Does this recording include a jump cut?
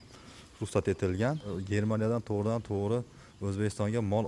yes; 1 cut; at 1.6 s

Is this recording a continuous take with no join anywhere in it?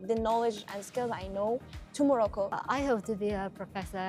no; 2 cuts; at 1.8 s, 2.5 s

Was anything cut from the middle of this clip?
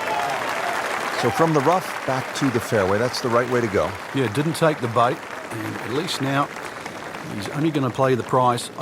yes; 1 cut; at 1.2 s

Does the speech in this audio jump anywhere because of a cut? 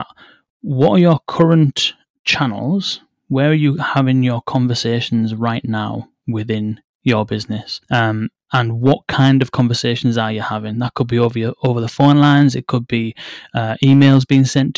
yes; 2 cuts; at 2.1 s, 7.7 s

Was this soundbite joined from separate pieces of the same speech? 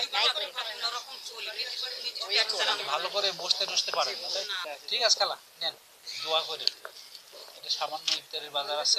yes; 1 cut; at 4.6 s

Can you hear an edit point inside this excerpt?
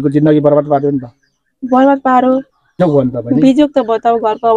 yes; 1 cut; at 2.8 s

